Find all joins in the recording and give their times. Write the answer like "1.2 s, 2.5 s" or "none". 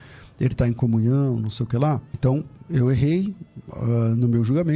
2.1 s